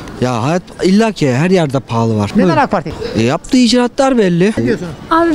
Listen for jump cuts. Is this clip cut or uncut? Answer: cut